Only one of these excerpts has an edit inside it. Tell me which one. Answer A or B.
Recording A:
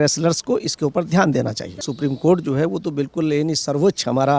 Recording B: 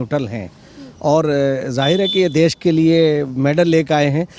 A